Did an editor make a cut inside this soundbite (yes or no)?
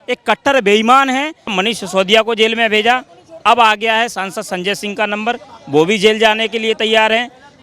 yes